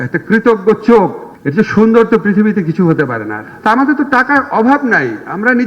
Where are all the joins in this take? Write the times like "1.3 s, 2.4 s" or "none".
3.4 s